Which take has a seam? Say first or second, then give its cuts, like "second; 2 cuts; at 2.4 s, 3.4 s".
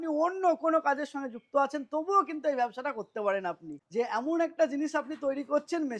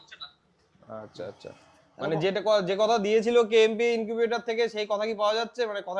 first; 1 cut; at 3.7 s